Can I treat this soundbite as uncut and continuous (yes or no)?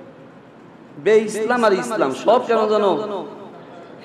yes